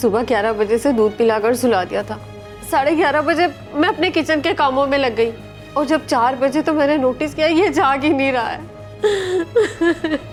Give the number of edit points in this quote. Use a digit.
0